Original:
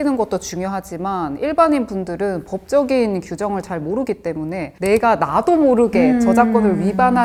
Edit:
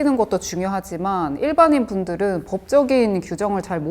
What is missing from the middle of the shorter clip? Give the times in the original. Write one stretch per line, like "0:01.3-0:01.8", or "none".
none